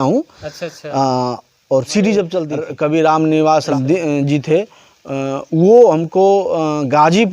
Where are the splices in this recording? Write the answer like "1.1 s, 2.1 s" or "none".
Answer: 2.6 s, 3.7 s